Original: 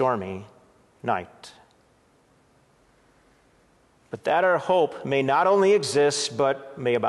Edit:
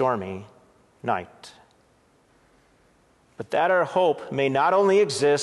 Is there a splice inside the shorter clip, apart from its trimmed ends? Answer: yes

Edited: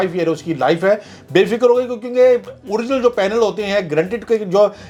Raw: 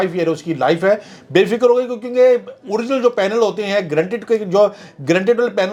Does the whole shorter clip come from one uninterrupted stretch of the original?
yes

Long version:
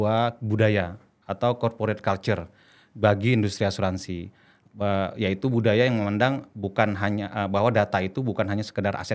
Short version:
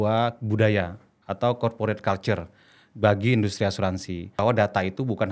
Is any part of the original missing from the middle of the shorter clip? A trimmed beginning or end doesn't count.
yes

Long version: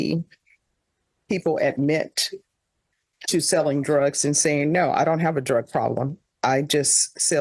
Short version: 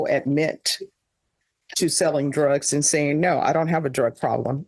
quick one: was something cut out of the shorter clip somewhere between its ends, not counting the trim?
no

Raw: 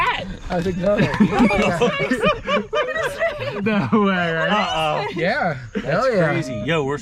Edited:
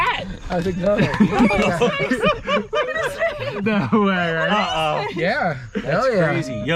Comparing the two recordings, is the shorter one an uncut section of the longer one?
yes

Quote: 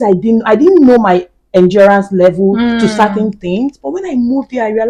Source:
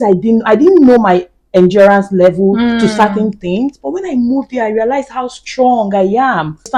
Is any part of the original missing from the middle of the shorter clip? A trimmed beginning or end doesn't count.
no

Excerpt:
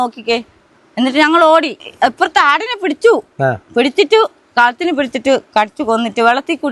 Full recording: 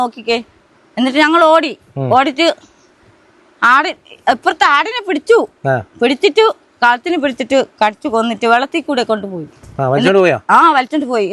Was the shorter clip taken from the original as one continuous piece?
no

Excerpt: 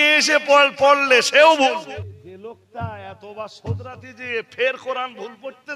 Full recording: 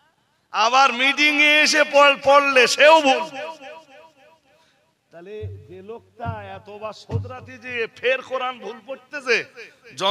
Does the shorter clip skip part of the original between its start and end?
yes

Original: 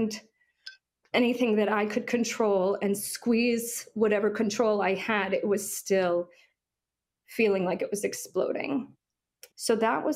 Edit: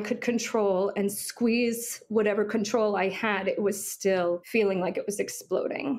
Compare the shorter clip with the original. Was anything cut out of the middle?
yes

